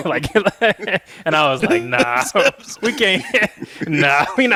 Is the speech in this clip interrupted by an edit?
no; 0 cuts

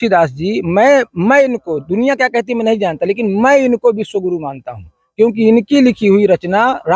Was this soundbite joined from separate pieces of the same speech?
no; 0 cuts

